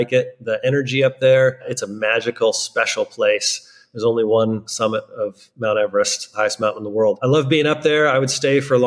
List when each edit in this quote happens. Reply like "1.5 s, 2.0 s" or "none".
1.8 s, 4.7 s, 7.2 s